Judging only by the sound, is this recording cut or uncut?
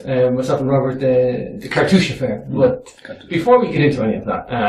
cut